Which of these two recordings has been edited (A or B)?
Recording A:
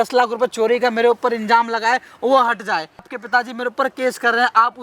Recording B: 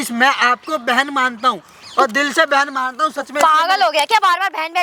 A